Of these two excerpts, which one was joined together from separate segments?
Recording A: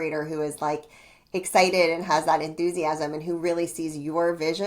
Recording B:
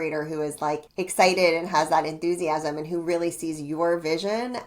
B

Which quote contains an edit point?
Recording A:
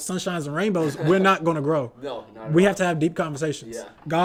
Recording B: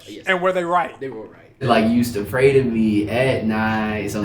B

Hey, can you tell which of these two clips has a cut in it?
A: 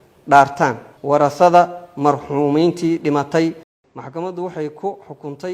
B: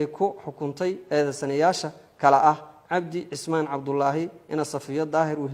A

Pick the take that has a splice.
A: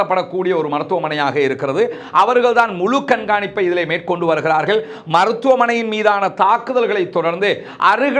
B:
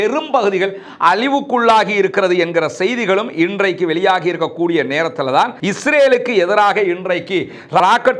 B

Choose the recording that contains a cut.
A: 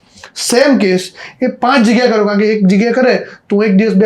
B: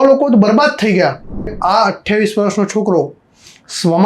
B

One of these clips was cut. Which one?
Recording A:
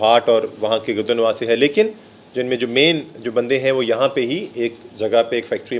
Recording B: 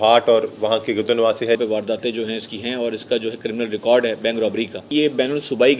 B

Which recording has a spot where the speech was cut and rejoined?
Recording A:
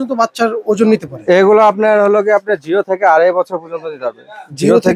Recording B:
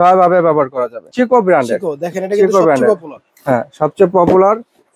B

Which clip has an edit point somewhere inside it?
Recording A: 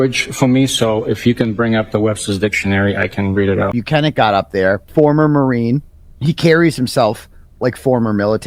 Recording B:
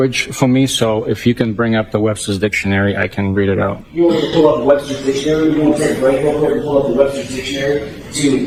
A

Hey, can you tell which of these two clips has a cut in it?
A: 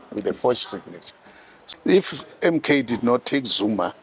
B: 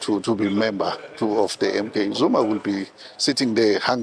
A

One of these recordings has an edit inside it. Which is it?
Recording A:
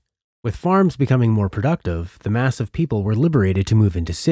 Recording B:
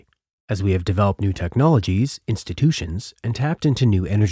B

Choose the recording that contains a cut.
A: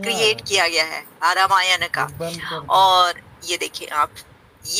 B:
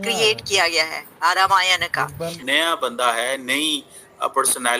B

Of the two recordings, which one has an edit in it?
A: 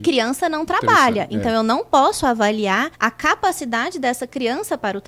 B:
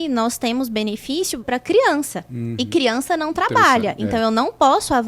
B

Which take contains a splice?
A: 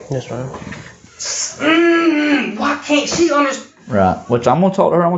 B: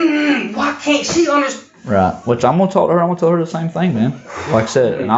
A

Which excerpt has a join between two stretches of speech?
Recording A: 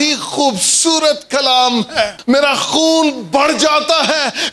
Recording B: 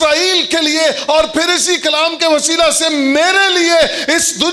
A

